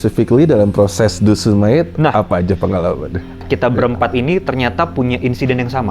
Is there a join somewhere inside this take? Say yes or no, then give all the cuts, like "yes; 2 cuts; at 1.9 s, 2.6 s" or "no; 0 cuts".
yes; 1 cut; at 3.4 s